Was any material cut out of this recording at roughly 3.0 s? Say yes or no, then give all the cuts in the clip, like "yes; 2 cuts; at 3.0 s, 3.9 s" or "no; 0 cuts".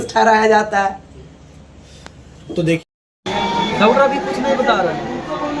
no; 0 cuts